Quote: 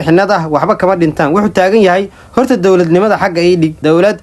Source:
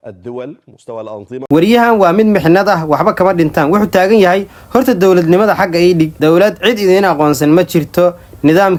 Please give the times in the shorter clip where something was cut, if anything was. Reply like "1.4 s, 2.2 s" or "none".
none